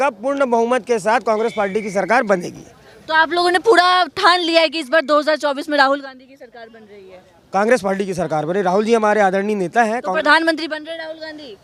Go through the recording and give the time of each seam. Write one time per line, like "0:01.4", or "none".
none